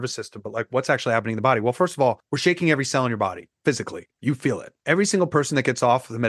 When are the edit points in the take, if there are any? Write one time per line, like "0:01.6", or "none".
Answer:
0:02.3
0:03.5
0:04.3